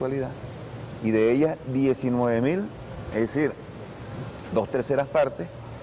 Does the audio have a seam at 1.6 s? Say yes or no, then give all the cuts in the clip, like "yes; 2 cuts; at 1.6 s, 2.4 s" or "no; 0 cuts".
yes; 1 cut; at 1.6 s